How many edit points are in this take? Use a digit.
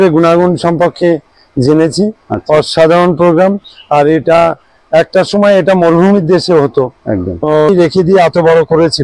1